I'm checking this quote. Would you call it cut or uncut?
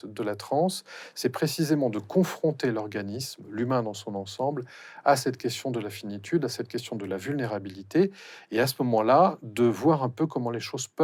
uncut